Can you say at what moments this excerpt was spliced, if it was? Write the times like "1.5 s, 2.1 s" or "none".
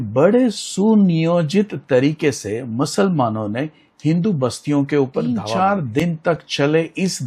5.4 s